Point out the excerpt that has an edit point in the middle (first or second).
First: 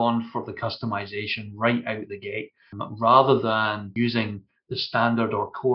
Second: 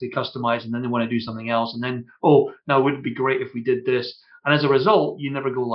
first